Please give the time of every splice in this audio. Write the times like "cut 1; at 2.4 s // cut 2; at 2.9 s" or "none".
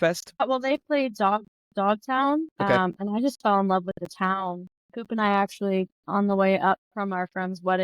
none